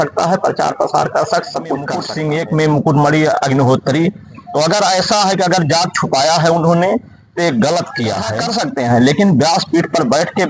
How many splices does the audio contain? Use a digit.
2